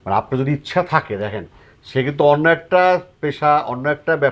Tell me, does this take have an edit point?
no; 0 cuts

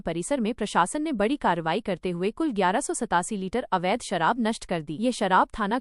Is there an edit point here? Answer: no; 0 cuts

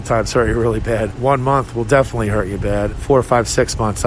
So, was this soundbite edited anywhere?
yes; 2 cuts; at 1.1 s, 3.0 s

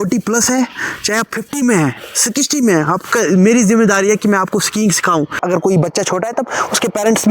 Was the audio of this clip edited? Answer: yes; 1 cut; at 5.4 s

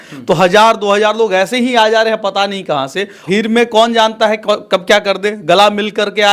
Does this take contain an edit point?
yes; 1 cut; at 3.2 s

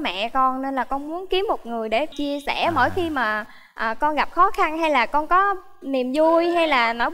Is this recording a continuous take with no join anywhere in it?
no; 1 cut; at 2.1 s

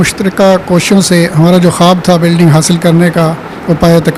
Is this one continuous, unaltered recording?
yes; 0 cuts

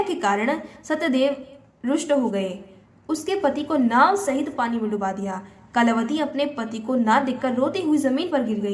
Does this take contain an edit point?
no; 0 cuts

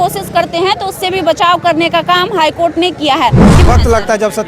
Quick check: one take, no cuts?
no; 1 cut; at 3.5 s

